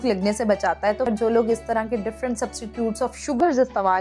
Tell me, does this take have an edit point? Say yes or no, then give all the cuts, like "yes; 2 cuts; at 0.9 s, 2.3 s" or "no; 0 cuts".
yes; 1 cut; at 1.1 s